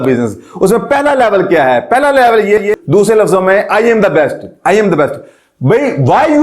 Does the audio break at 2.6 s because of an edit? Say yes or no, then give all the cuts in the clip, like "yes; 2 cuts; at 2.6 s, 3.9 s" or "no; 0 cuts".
yes; 1 cut; at 2.6 s